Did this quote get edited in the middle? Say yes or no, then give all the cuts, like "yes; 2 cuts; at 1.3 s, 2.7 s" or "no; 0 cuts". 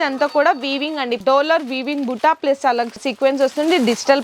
yes; 1 cut; at 1.2 s